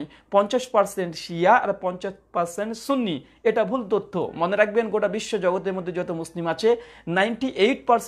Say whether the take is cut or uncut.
uncut